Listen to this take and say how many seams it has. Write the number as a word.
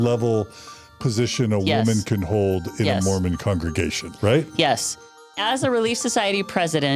two